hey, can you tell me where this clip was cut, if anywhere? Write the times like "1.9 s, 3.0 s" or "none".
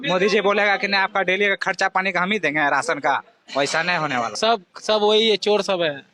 4.3 s

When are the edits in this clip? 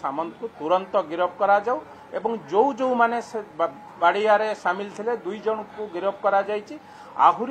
none

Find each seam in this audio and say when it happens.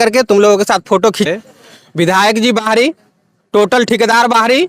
1.3 s

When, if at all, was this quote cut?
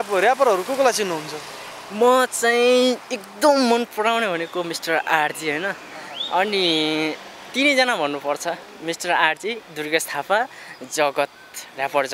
none

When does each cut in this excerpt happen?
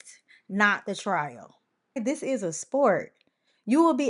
2.0 s

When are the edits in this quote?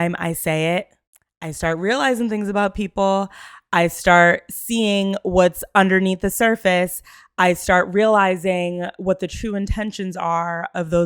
none

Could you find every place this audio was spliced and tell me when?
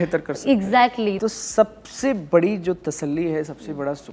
1.2 s

